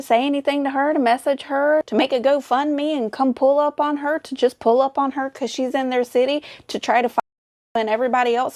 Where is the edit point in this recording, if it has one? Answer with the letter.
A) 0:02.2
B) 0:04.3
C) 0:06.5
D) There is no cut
D